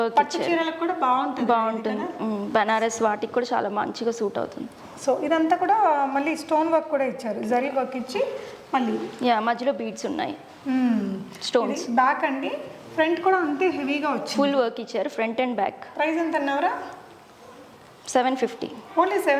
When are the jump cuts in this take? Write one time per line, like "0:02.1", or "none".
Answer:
none

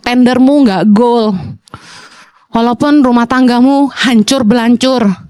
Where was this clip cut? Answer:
none

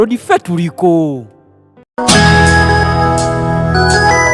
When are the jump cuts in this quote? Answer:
0:01.8

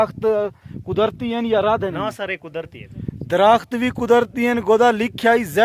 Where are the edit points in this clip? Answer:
none

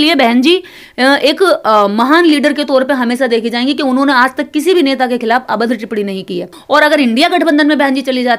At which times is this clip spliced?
0:06.5

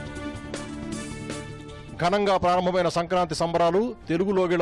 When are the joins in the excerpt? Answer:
0:01.6

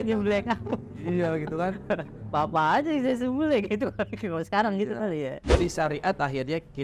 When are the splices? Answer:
0:05.5

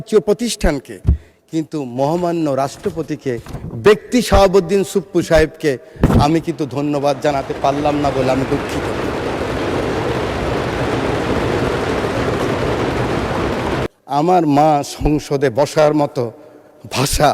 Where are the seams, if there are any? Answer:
0:13.9

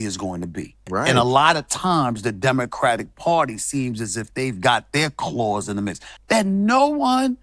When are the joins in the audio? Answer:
0:00.8
0:06.1

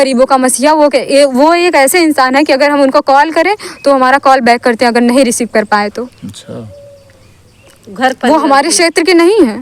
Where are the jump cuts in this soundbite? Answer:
none

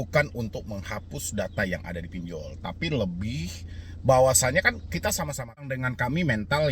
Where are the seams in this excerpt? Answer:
0:05.8

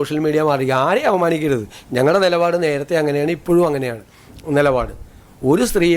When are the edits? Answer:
none

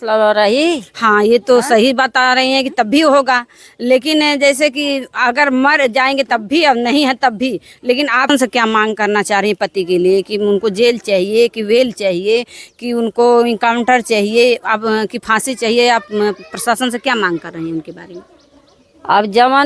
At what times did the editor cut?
0:08.3

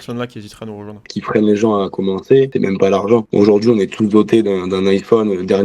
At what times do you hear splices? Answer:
0:01.1

